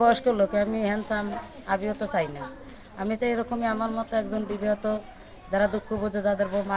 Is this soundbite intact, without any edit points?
yes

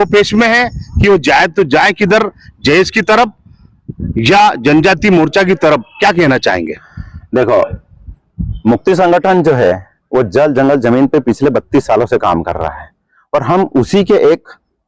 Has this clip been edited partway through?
no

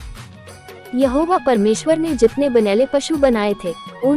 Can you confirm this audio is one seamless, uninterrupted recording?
no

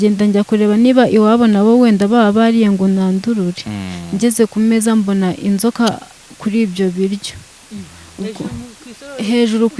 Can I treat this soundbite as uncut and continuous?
yes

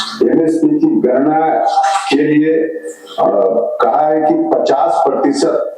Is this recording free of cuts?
yes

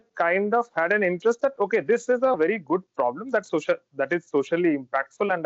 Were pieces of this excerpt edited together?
no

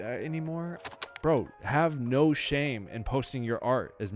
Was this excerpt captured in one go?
no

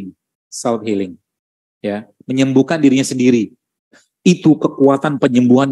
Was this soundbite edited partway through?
yes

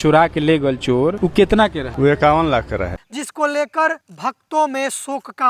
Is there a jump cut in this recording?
no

